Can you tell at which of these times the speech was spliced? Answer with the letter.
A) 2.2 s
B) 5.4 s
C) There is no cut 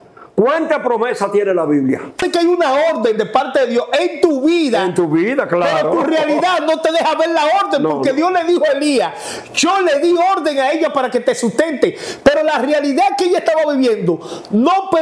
A